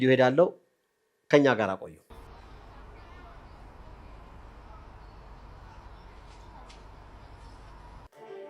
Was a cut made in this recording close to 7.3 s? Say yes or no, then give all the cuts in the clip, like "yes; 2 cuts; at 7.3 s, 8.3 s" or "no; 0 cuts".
no; 1 cut; at 2.0 s